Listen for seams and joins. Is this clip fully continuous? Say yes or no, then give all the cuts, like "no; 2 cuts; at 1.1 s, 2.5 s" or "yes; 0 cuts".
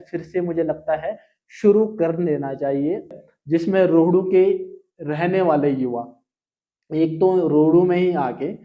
no; 1 cut; at 3.1 s